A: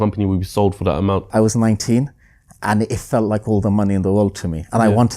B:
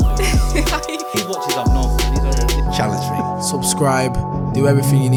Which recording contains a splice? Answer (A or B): A